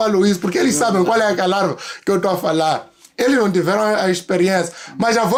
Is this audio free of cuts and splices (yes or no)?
yes